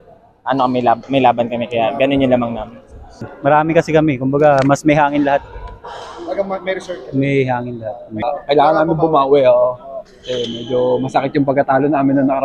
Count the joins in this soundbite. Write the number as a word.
two